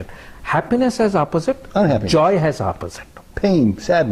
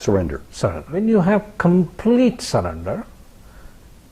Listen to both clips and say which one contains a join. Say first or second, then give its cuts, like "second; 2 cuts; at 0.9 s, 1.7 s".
second; 1 cut; at 1.0 s